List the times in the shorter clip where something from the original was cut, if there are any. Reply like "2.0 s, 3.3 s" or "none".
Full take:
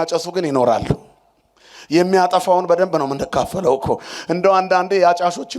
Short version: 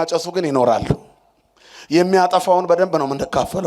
none